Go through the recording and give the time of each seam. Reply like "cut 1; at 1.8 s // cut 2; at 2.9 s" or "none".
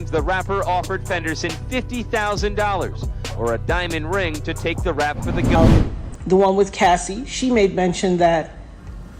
cut 1; at 5.5 s